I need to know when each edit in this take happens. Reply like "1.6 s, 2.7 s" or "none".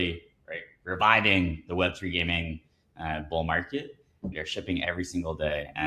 4.3 s